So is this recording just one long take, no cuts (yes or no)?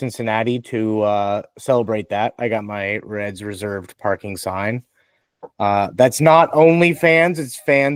yes